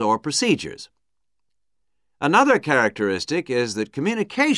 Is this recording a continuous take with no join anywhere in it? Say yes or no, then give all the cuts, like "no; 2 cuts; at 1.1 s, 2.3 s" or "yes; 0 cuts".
no; 1 cut; at 1.5 s